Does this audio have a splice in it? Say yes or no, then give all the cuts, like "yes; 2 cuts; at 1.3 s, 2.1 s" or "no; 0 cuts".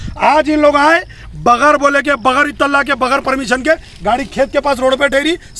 no; 0 cuts